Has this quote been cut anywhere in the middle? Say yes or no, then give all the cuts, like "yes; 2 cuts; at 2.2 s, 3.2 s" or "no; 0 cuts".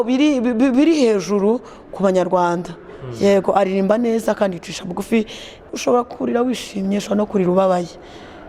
yes; 1 cut; at 5.7 s